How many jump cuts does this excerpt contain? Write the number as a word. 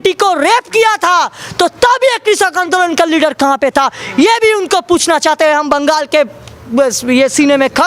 zero